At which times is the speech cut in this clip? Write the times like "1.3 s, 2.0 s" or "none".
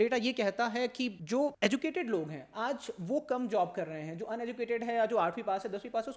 none

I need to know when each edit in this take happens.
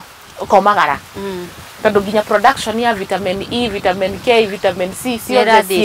none

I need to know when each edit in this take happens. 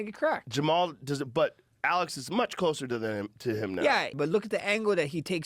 4.1 s

